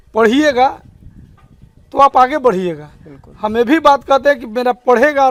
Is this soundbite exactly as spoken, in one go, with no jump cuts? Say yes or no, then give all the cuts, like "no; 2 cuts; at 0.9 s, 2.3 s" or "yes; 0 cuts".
yes; 0 cuts